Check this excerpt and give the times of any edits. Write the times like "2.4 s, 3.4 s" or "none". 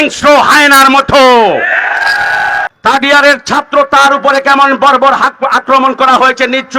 2.7 s